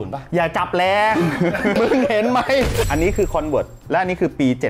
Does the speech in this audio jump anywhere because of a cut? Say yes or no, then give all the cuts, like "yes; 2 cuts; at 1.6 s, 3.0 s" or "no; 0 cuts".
yes; 2 cuts; at 1.7 s, 2.9 s